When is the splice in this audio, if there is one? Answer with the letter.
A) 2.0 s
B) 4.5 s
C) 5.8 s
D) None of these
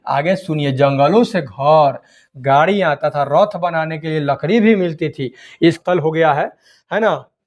C